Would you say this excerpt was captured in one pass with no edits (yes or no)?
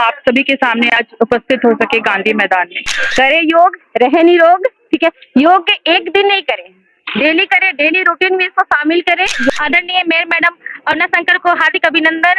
no